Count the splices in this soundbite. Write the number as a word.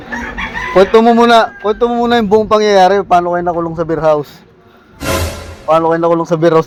zero